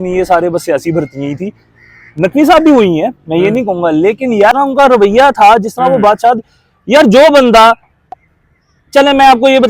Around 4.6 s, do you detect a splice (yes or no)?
yes